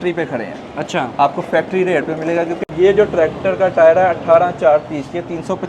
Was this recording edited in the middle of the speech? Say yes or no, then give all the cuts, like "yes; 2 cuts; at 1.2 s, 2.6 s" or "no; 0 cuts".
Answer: yes; 1 cut; at 2.6 s